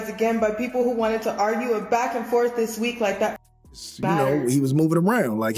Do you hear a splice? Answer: yes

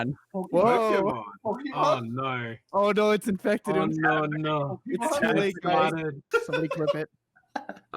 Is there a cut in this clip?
yes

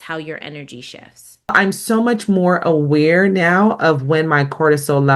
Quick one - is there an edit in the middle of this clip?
yes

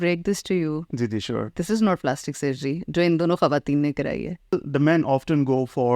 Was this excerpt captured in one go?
no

